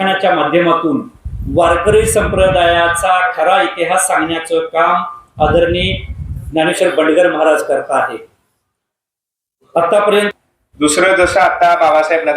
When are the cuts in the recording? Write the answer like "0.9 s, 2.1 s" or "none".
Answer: 10.3 s